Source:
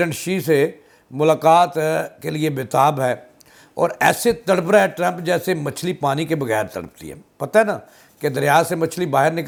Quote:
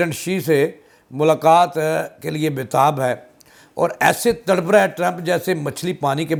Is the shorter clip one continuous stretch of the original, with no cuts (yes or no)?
yes